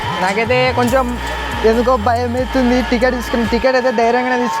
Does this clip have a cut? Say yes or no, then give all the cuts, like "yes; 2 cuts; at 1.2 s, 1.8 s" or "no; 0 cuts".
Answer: no; 0 cuts